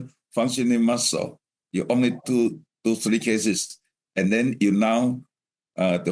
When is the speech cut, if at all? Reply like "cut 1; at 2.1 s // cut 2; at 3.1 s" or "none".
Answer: none